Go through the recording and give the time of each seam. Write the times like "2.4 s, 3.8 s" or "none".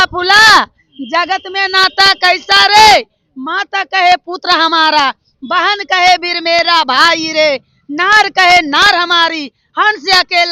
none